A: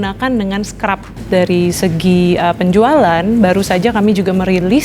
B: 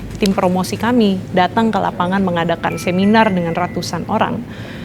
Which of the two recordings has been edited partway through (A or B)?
A